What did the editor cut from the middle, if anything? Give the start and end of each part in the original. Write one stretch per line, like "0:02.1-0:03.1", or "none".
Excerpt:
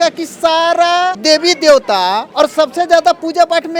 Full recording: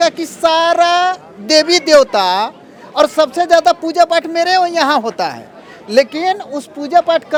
0:01.2-0:01.4
0:02.5-0:02.9